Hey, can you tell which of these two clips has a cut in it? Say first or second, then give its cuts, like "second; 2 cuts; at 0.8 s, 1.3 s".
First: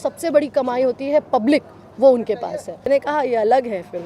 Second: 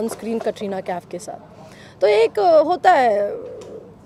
first; 1 cut; at 2.9 s